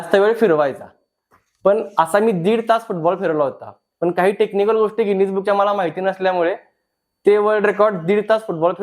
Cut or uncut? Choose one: uncut